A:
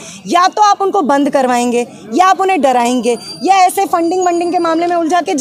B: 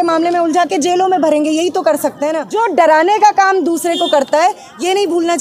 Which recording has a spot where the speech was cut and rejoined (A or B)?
B